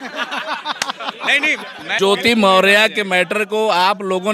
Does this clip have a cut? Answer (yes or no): no